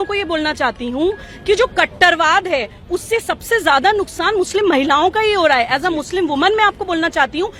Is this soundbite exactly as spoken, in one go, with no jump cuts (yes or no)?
yes